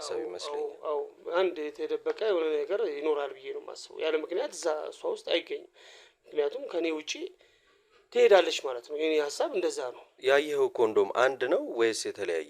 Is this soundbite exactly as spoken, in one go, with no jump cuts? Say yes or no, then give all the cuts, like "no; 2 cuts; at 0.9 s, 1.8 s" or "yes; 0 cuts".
no; 1 cut; at 10.1 s